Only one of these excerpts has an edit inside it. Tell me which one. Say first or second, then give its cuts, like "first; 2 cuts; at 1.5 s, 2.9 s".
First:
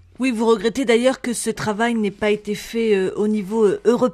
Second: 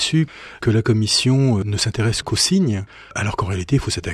second; 1 cut; at 3.0 s